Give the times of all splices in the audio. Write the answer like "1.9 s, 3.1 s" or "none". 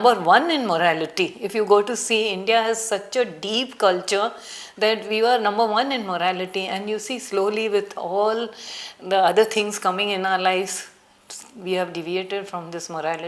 none